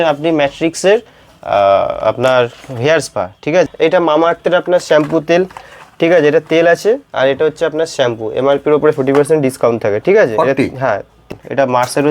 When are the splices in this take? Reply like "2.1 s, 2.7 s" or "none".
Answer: 3.7 s, 11.2 s

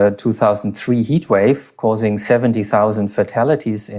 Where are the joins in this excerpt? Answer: none

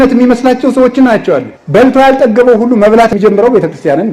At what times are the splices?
1.5 s, 3.1 s

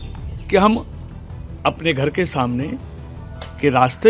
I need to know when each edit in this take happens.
none

